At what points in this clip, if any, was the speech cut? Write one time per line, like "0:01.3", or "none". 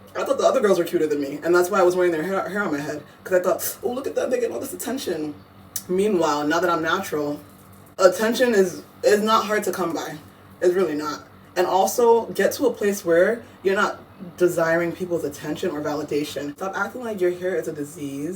0:07.9
0:16.6